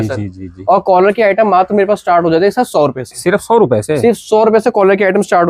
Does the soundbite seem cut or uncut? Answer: uncut